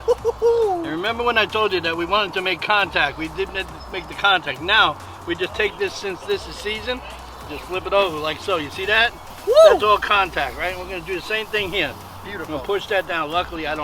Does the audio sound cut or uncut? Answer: uncut